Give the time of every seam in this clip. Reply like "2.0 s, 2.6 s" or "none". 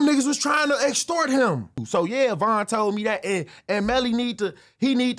1.8 s